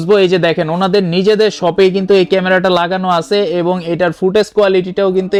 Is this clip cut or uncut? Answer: uncut